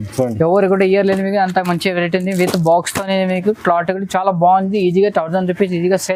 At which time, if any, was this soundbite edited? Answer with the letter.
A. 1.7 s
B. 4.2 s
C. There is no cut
C